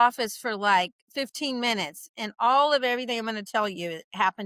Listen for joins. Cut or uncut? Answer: uncut